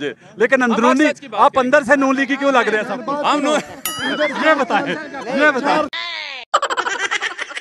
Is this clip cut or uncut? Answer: uncut